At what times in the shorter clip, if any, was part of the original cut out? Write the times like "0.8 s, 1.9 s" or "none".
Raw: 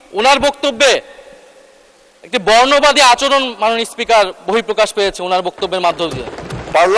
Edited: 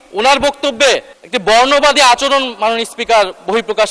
1.2 s